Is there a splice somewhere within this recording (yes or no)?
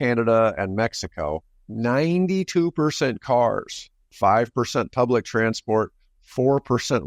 no